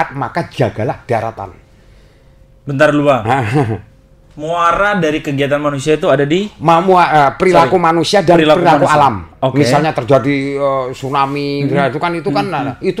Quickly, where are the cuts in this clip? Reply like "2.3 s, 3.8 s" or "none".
none